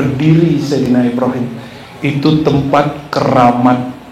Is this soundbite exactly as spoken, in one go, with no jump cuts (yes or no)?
yes